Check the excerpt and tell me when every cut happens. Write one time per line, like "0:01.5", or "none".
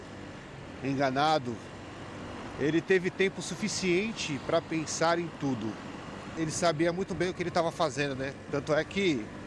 0:06.3